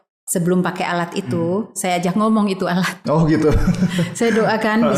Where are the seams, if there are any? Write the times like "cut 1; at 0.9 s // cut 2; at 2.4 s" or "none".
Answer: none